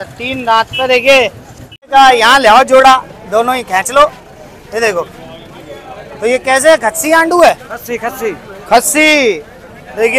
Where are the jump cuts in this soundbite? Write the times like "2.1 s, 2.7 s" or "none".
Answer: 1.9 s